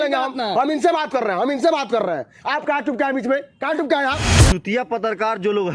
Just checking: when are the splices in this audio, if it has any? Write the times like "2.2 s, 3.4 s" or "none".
4.4 s